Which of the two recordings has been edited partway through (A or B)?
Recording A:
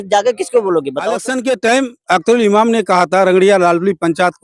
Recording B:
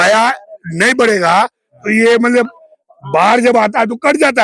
A